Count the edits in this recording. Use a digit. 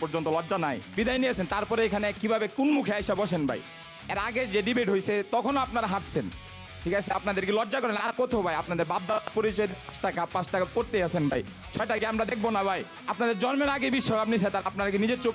0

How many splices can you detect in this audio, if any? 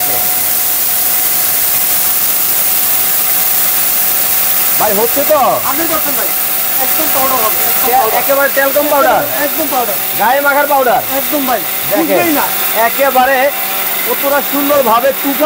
0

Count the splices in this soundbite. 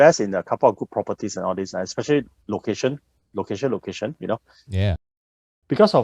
1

